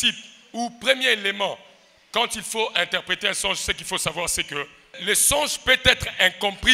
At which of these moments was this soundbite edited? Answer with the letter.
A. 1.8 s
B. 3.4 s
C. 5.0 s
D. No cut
C